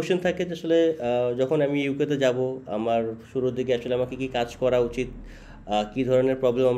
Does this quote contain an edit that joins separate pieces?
no; 0 cuts

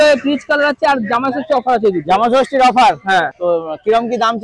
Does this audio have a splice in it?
yes; 1 cut; at 3.3 s

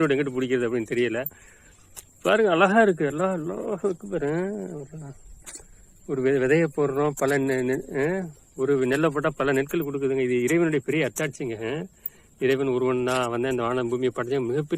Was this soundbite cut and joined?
no; 0 cuts

